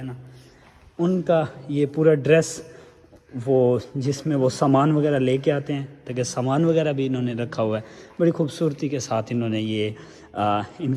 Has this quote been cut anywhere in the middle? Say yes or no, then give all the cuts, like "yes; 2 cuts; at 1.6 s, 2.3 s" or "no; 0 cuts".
no; 0 cuts